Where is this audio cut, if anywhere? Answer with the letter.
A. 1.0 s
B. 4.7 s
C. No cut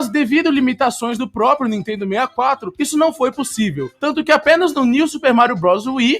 A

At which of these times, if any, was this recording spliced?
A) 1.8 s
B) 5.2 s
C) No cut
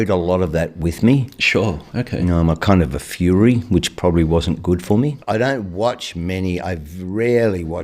B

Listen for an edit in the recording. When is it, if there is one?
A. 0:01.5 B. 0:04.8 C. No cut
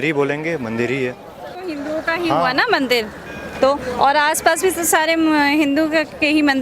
A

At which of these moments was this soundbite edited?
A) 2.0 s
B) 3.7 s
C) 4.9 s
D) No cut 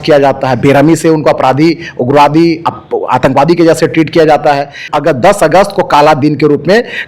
C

